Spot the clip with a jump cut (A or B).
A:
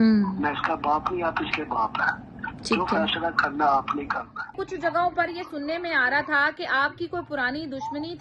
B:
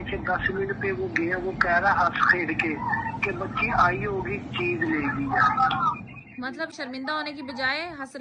A